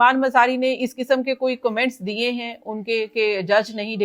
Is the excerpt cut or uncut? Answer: uncut